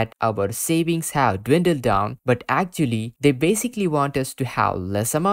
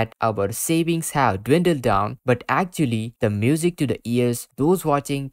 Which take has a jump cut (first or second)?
first